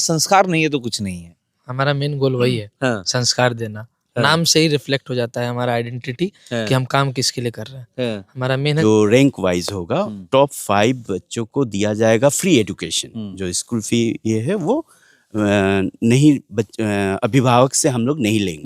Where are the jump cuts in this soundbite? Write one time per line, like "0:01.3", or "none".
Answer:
0:08.8